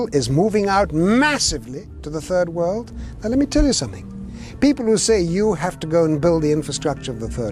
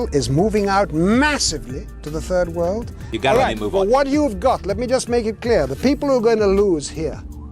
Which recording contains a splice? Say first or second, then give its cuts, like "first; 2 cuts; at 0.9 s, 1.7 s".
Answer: second; 1 cut; at 3.0 s